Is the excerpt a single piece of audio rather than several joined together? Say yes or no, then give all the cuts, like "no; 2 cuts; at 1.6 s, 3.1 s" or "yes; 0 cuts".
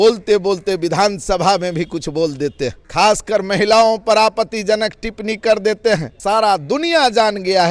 no; 2 cuts; at 2.8 s, 6.1 s